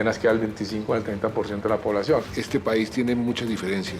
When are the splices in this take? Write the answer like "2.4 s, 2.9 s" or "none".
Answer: 2.3 s